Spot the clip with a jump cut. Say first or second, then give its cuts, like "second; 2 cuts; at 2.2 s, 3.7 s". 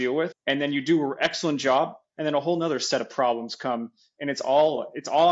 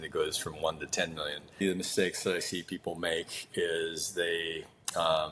second; 1 cut; at 1.6 s